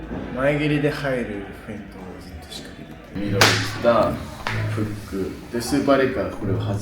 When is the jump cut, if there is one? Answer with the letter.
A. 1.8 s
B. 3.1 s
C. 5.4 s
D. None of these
B